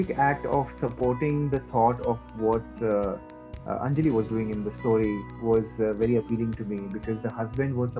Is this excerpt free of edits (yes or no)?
yes